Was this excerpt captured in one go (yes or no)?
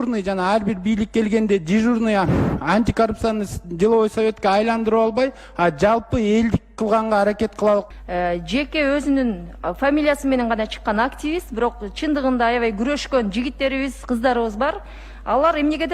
no